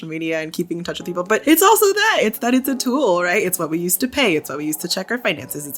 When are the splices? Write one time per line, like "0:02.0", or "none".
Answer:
0:01.4